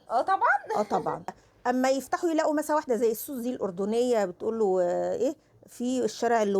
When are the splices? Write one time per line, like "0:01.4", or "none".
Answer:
0:01.5